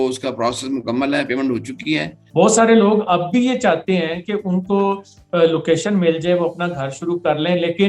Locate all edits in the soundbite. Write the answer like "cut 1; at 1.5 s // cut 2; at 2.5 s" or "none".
cut 1; at 2.2 s